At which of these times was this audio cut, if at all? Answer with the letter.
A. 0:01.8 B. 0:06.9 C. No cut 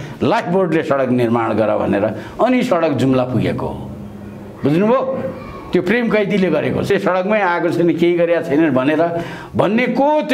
B